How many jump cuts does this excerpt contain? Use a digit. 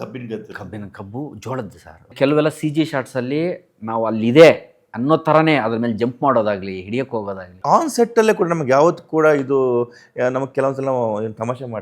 2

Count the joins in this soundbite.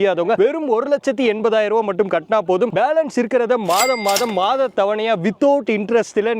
0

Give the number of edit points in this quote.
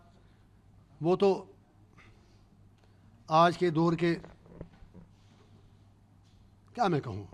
0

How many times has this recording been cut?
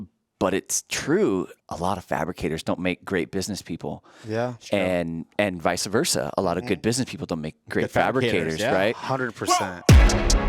2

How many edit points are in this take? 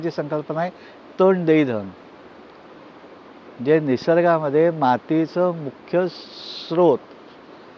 0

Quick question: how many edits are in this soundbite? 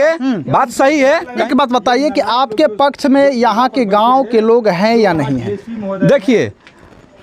1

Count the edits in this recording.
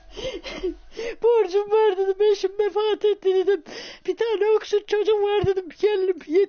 0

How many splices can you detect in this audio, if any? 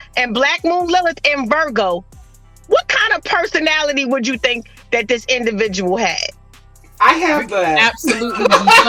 0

